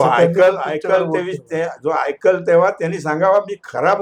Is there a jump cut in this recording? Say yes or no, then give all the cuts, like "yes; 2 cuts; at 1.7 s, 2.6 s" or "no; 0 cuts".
no; 0 cuts